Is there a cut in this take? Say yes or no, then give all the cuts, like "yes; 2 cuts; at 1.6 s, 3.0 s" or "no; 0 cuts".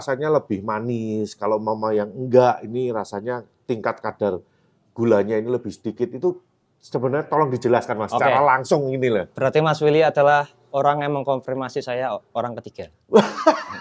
no; 0 cuts